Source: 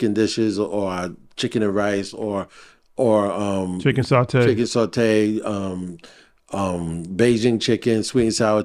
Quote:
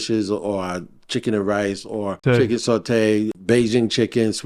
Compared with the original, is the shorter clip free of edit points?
no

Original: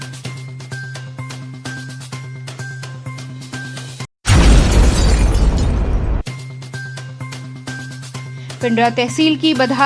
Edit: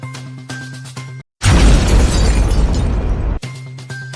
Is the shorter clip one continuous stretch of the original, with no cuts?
no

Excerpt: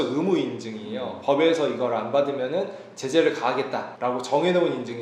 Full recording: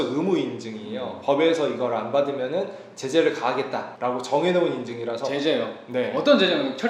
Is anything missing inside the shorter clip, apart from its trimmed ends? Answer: no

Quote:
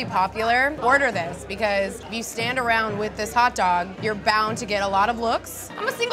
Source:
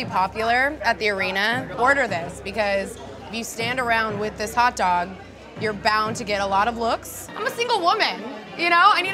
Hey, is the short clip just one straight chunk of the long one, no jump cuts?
no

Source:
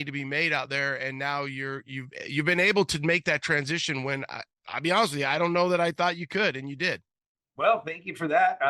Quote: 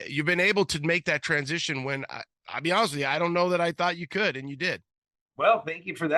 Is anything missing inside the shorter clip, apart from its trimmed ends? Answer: no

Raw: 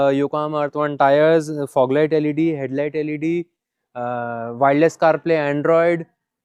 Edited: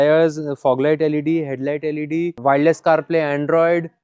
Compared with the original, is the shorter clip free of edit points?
no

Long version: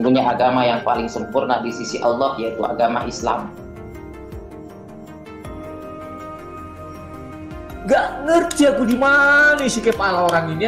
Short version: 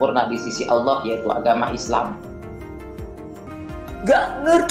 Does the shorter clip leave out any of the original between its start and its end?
yes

